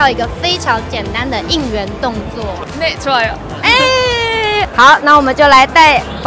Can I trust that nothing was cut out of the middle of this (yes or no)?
yes